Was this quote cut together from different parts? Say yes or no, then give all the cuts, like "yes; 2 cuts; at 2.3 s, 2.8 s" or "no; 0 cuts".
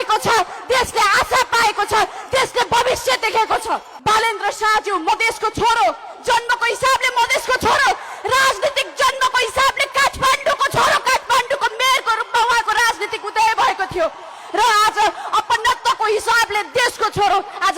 yes; 1 cut; at 3.9 s